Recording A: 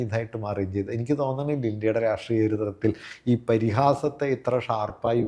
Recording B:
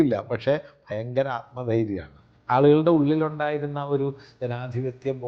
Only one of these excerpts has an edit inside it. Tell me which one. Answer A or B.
B